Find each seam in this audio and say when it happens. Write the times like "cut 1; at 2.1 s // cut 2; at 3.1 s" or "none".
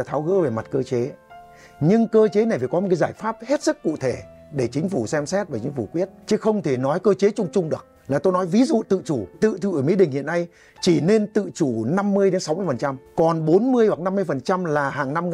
cut 1; at 6.2 s // cut 2; at 7.9 s // cut 3; at 9.3 s // cut 4; at 13.0 s